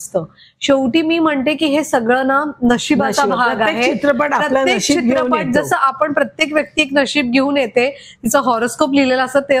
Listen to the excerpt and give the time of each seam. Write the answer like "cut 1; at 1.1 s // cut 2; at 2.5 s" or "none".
none